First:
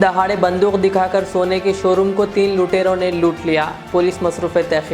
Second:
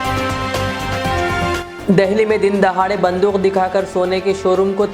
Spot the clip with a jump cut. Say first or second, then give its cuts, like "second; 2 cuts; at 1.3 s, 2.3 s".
second; 1 cut; at 1.7 s